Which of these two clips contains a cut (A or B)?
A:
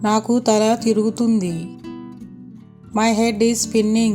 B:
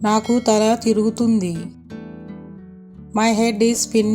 B